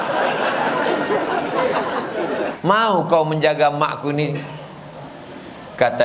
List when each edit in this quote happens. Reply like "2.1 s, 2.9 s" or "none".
2.5 s